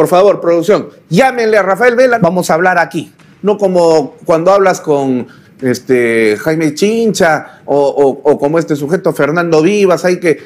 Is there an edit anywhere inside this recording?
yes; 1 cut; at 2.2 s

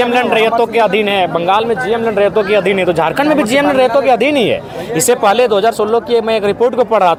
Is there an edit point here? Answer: no; 0 cuts

